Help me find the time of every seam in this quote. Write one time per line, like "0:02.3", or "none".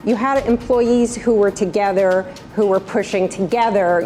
none